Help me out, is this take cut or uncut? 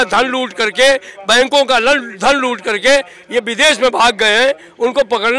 uncut